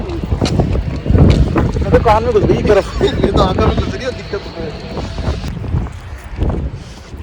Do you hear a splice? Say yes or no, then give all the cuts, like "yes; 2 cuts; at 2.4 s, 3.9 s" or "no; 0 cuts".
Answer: yes; 1 cut; at 5.5 s